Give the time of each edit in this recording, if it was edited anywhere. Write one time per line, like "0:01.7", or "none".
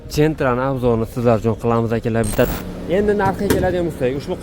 0:02.4

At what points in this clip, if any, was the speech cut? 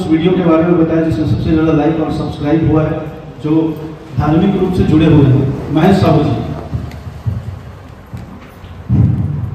none

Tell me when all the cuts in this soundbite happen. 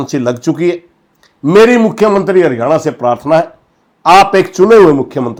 none

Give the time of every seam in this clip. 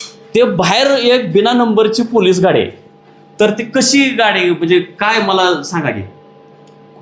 none

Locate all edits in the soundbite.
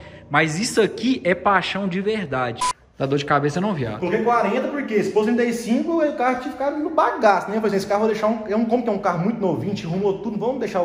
0:02.6

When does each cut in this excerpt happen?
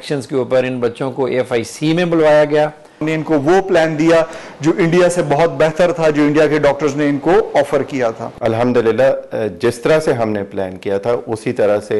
0:02.9
0:08.4

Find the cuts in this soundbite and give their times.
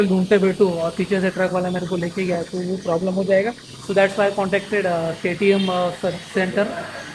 none

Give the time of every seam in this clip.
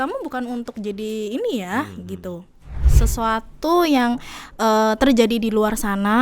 0:03.0

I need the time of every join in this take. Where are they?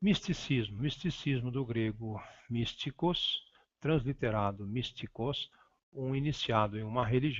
0:01.2

